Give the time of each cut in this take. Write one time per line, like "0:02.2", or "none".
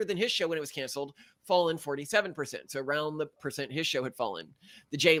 none